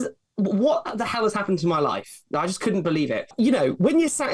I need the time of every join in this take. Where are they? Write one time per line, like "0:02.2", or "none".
0:03.3

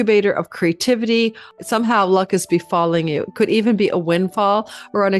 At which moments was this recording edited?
0:01.5

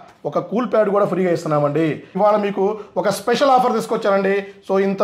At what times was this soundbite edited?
0:02.1

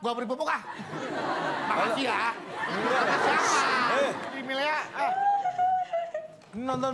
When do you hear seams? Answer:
0:04.4

